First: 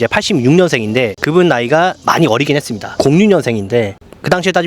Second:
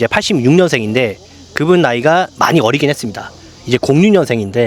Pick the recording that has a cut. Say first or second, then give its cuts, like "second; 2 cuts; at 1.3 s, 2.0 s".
first; 2 cuts; at 1.2 s, 3.0 s